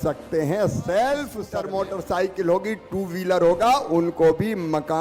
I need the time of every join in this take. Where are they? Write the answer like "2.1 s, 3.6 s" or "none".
1.4 s